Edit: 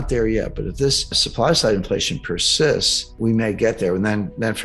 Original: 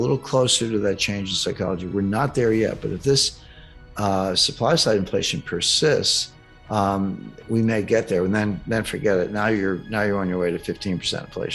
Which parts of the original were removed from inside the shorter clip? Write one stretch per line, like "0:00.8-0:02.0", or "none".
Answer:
0:03.5-0:04.5
0:06.2-0:07.3